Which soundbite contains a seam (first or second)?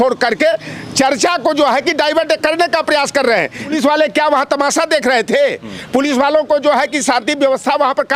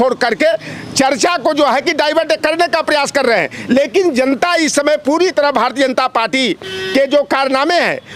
first